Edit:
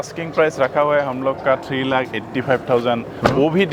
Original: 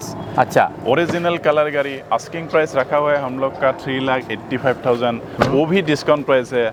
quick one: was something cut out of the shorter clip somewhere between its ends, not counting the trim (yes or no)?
no